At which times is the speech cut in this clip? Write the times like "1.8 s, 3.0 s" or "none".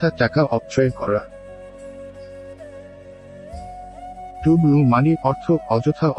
1.2 s, 4.4 s